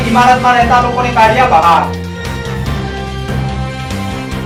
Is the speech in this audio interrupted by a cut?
no; 0 cuts

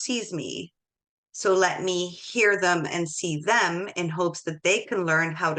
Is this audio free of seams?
yes; 0 cuts

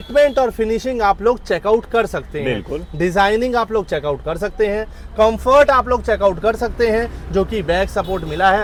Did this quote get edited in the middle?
no; 0 cuts

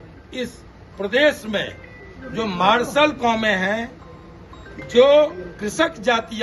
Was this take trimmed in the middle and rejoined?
no; 0 cuts

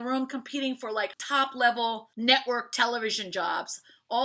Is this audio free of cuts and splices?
no; 2 cuts; at 1.2 s, 2.1 s

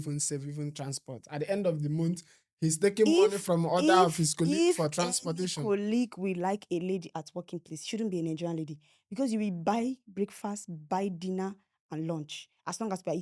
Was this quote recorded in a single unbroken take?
yes; 0 cuts

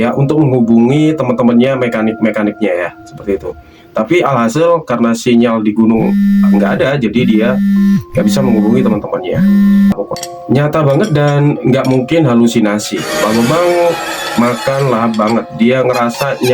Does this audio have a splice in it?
yes; 1 cut; at 9.9 s

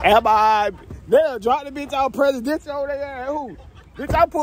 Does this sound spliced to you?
no; 0 cuts

